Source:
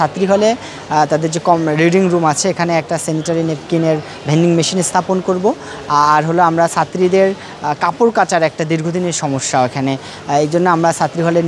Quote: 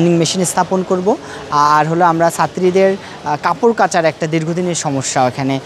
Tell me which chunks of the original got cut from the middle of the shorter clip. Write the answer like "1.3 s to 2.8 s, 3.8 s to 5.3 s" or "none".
none